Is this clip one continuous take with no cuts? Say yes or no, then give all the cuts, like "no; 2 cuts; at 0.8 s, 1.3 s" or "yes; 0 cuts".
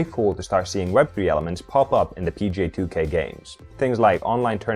no; 1 cut; at 3.7 s